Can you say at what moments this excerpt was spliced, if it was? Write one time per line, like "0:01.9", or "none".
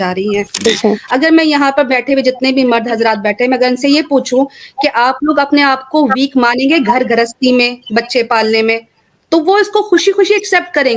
0:01.0